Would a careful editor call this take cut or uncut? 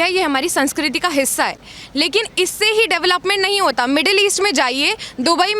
uncut